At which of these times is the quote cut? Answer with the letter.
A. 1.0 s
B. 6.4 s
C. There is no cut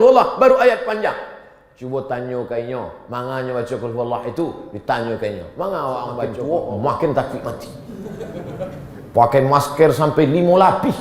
B